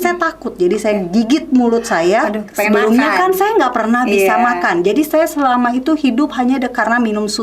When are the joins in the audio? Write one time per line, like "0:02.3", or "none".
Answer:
0:02.4